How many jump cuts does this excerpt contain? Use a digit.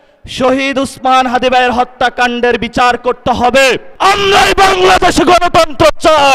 1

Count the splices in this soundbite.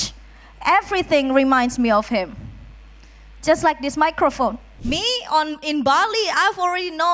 1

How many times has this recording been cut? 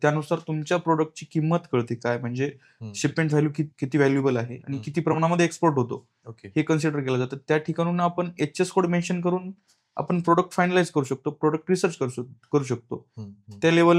1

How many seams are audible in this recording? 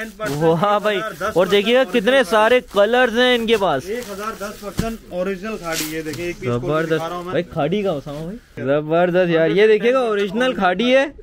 1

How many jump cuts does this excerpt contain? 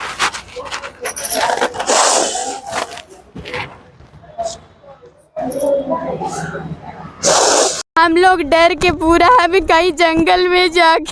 1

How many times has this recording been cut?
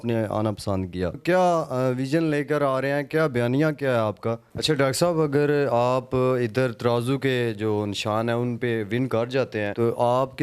2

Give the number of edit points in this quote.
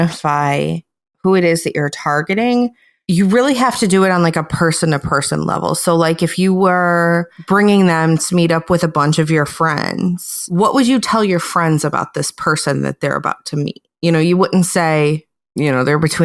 1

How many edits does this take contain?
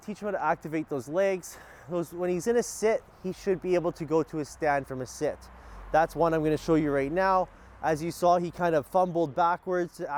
0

